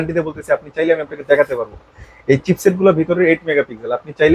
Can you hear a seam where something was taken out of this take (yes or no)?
no